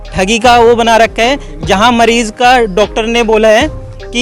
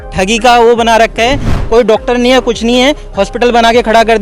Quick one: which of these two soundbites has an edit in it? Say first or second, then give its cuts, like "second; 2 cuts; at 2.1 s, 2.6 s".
second; 1 cut; at 1.5 s